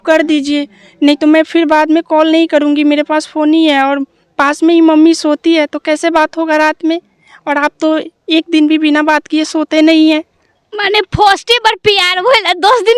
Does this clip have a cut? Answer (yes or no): no